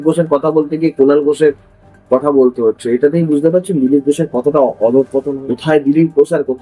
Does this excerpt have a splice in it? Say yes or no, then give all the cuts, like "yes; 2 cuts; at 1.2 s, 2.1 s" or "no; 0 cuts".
yes; 1 cut; at 5.3 s